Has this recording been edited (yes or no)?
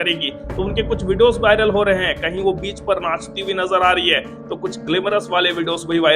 no